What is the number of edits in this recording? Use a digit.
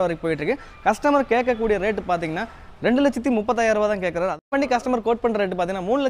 1